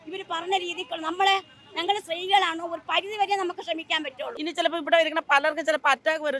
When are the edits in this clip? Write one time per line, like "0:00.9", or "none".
0:04.3